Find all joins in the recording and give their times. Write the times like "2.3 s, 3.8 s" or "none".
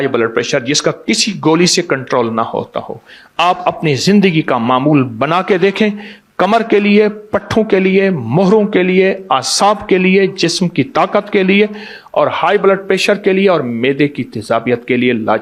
none